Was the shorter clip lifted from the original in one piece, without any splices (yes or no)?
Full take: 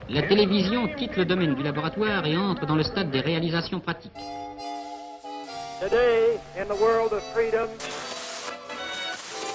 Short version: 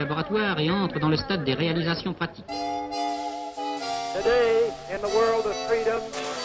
yes